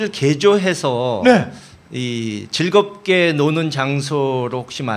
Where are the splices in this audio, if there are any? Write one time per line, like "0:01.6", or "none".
none